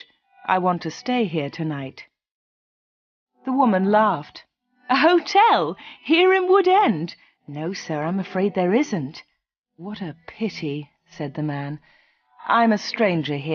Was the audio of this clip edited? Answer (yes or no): no